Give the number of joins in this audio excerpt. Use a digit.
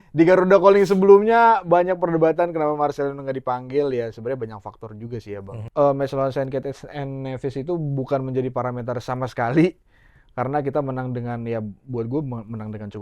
1